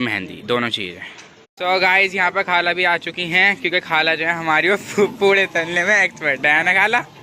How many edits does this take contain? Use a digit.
1